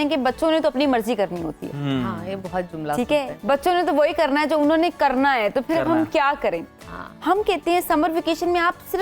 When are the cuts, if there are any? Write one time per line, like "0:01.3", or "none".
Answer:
none